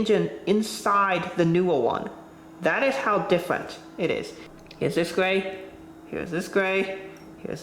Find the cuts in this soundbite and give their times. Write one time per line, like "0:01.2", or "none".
0:04.4